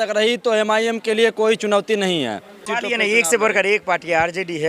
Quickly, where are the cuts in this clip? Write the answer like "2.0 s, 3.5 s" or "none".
2.7 s